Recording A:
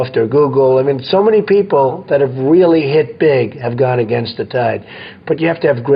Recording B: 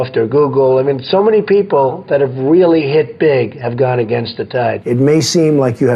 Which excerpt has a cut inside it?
B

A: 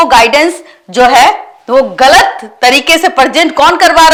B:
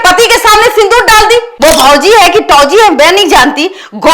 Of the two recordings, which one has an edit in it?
B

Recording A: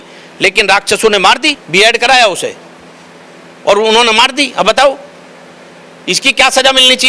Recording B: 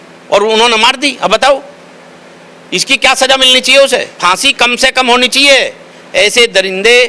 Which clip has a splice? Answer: A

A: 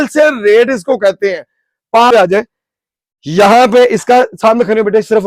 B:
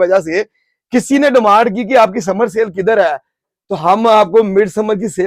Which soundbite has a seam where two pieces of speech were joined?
A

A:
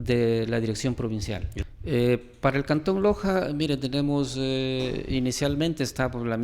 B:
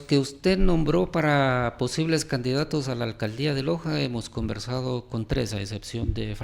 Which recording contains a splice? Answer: A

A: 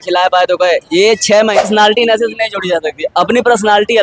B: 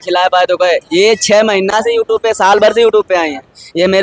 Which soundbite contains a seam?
A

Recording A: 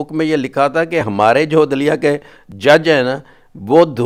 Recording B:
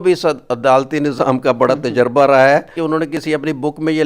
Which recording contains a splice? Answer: B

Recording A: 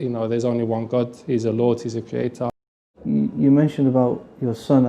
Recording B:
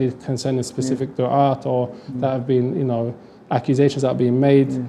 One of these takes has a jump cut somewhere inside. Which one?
A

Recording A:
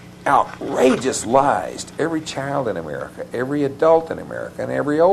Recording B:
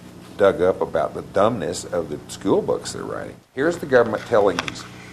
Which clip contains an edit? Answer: B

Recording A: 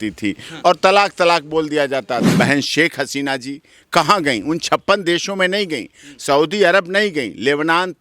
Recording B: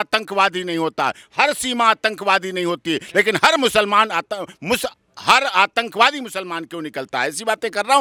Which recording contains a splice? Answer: A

